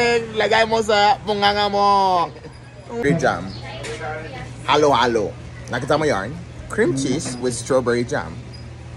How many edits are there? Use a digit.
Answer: 1